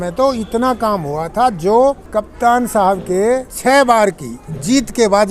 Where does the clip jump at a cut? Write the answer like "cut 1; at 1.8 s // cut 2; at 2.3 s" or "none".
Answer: cut 1; at 2.0 s // cut 2; at 3.5 s